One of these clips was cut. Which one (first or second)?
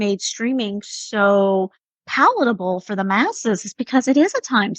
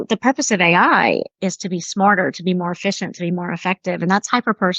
second